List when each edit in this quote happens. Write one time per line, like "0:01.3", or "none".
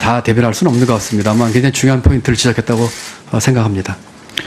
0:02.6